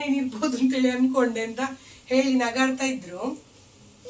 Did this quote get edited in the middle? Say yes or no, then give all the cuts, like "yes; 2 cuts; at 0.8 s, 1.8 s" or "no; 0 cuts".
no; 0 cuts